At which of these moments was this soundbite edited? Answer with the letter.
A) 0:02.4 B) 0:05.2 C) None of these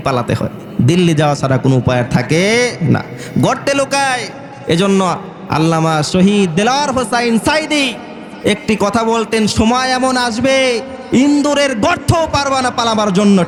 C